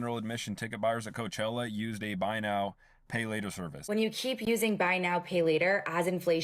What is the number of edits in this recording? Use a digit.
1